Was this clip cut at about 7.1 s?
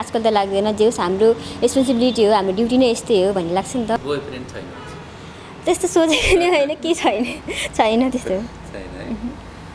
no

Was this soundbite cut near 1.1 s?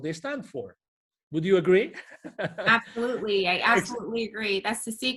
no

